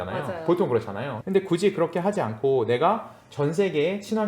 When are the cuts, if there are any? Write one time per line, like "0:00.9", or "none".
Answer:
0:01.2